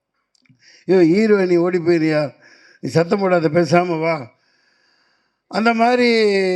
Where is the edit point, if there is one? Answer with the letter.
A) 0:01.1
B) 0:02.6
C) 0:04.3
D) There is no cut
D